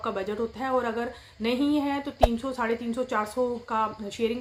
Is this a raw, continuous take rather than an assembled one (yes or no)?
yes